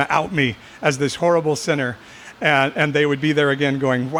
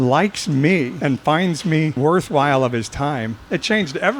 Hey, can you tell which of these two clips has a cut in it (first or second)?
second